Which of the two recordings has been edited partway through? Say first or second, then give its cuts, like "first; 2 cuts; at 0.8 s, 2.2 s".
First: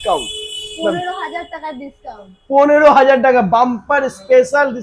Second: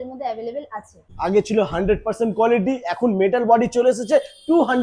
second; 1 cut; at 1.1 s